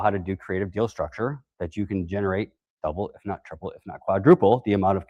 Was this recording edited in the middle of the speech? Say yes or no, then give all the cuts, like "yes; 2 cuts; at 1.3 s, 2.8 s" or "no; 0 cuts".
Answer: no; 0 cuts